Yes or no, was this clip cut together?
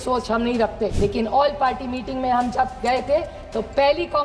yes